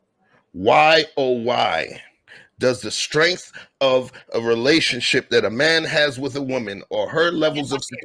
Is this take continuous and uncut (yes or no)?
yes